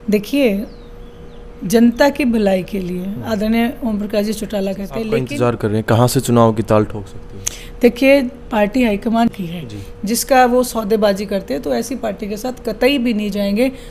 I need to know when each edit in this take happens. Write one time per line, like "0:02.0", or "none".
0:05.2
0:09.3